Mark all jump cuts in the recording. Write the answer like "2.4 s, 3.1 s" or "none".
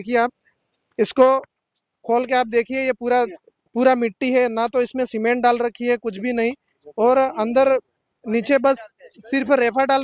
none